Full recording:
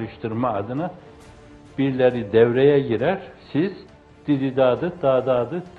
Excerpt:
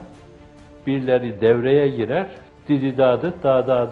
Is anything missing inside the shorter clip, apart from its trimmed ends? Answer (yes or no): yes